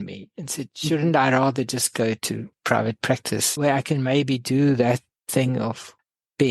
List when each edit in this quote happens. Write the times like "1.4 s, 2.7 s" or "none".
2.5 s